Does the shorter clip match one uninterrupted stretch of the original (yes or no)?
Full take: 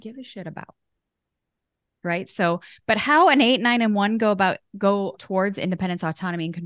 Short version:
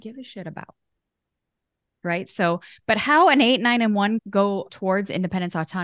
no